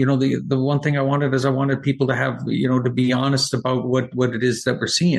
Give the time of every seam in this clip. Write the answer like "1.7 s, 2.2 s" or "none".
none